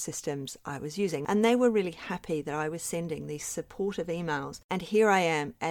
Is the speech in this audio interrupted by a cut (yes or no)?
yes